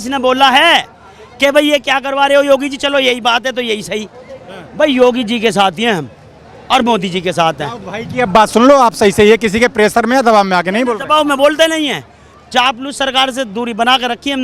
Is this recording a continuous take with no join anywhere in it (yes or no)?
yes